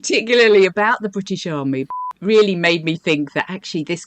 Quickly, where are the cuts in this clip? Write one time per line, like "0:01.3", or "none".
0:02.0